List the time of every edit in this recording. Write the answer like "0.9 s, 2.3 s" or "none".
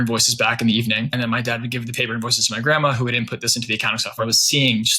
1.1 s, 4.2 s